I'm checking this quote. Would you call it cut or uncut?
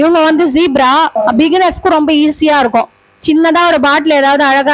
cut